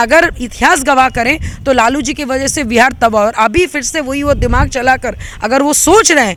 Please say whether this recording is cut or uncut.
uncut